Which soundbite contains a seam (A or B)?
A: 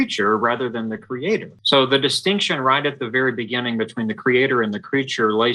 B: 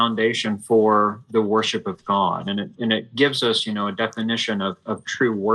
A